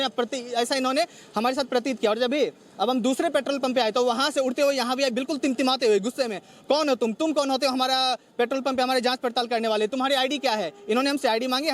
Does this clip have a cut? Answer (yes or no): no